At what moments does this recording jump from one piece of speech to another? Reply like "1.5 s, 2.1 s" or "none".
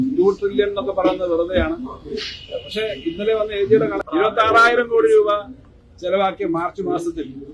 4.0 s